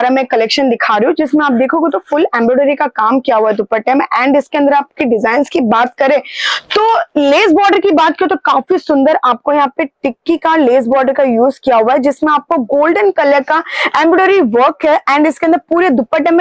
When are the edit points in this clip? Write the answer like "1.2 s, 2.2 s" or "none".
none